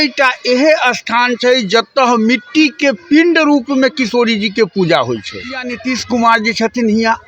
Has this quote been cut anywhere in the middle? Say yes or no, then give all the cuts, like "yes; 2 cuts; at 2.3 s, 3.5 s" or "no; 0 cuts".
yes; 1 cut; at 5.7 s